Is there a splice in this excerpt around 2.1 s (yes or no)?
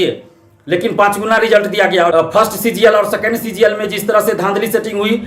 yes